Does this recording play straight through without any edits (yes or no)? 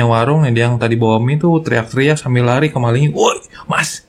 yes